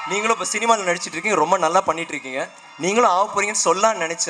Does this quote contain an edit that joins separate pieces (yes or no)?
no